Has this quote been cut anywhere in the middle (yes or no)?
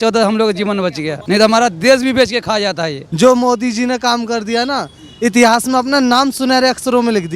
yes